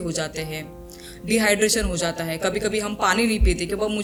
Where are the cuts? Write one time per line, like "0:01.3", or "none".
none